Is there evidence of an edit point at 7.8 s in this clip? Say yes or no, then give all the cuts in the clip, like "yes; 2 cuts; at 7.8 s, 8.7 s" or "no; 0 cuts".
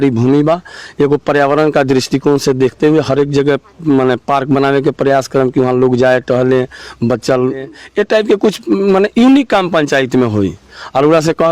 yes; 1 cut; at 7.8 s